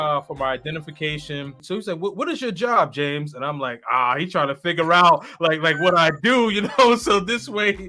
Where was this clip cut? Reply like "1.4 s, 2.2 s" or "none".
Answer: 1.6 s